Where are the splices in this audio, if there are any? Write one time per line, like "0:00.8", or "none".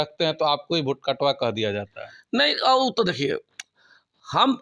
none